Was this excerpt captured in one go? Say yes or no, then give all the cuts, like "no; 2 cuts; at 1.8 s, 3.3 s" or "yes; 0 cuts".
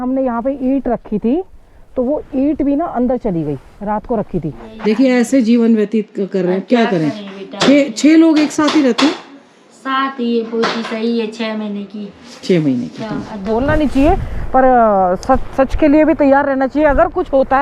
no; 2 cuts; at 4.7 s, 13.3 s